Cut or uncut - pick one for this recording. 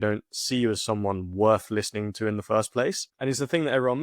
cut